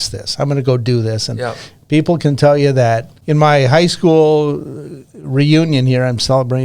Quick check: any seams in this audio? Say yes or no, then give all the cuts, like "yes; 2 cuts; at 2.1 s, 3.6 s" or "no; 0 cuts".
yes; 1 cut; at 3.1 s